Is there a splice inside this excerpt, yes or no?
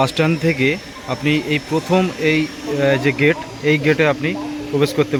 no